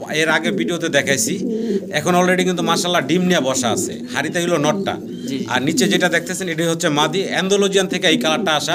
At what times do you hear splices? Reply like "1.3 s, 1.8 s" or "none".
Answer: none